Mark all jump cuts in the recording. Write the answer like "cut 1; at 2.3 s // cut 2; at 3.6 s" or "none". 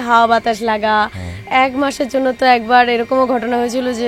cut 1; at 1.4 s